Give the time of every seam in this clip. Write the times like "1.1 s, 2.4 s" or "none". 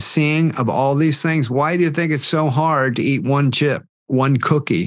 3.9 s